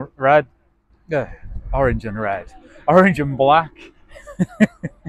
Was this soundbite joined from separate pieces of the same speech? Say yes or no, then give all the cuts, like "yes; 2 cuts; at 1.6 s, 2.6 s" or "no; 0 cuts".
no; 0 cuts